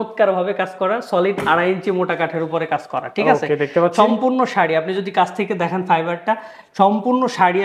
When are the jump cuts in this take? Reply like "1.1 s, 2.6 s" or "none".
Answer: none